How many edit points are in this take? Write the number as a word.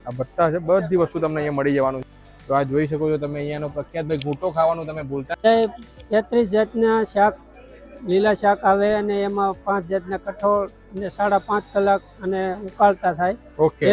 two